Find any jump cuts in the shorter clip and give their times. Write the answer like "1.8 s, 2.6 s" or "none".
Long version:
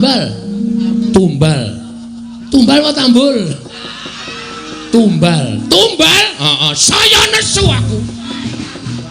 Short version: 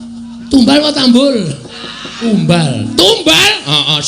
2.3 s

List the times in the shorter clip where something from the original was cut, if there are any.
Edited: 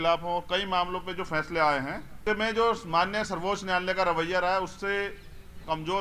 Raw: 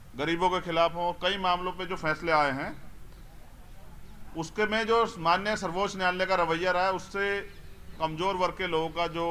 2.2 s

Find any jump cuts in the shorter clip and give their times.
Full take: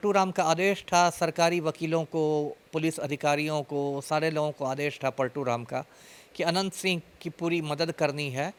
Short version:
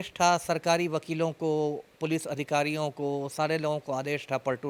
none

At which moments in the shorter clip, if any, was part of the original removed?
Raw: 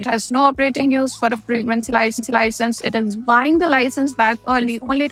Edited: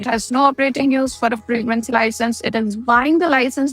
2.0 s

